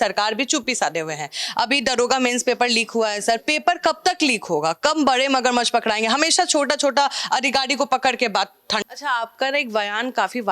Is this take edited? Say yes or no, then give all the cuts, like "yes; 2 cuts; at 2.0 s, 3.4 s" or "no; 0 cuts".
yes; 1 cut; at 8.8 s